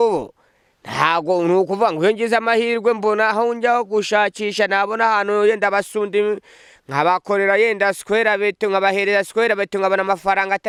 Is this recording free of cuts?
yes; 0 cuts

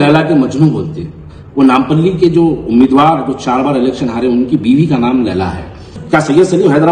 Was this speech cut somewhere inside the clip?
yes; 1 cut; at 5.9 s

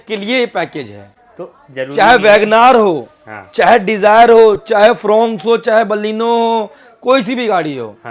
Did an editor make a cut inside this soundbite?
no; 0 cuts

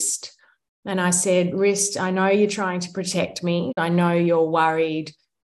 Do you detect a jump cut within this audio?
yes; 1 cut; at 3.8 s

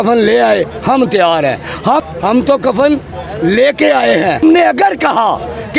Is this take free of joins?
no; 2 cuts; at 2.0 s, 4.4 s

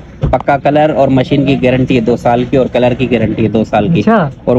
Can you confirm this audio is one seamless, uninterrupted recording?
yes; 0 cuts

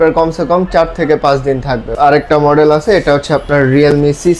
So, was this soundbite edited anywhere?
yes; 1 cut; at 1.9 s

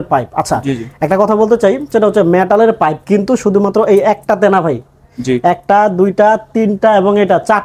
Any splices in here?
no; 0 cuts

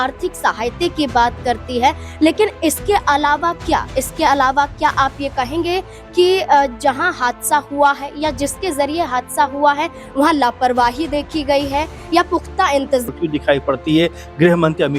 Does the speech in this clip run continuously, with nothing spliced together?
no; 1 cut; at 13.1 s

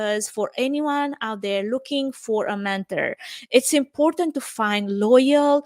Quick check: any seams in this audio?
no; 0 cuts

